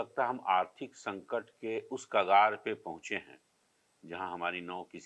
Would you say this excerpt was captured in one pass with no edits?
yes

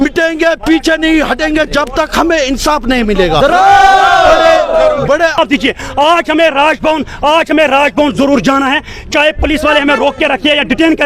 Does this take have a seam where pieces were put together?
yes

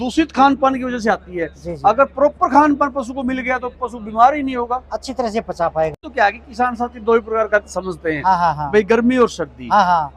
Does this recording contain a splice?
yes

